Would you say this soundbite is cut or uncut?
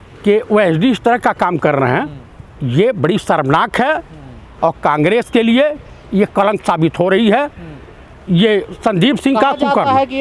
uncut